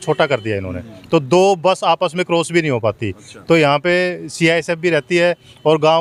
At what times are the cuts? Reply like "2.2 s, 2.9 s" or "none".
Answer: none